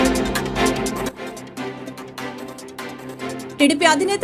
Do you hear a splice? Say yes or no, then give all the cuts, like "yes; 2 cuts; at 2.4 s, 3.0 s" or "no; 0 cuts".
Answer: no; 0 cuts